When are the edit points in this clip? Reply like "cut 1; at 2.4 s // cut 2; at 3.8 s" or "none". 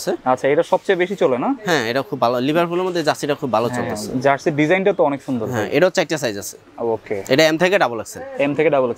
none